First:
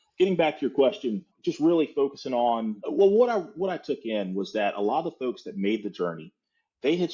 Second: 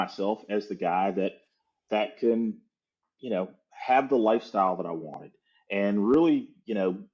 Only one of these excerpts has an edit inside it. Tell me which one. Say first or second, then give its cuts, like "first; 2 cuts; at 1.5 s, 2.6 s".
first; 2 cuts; at 1.3 s, 2.7 s